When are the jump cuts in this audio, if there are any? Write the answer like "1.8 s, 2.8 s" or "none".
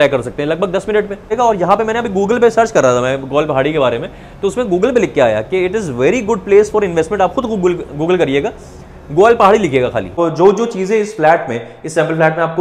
1.3 s, 10.1 s